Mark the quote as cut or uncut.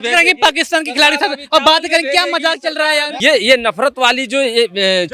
cut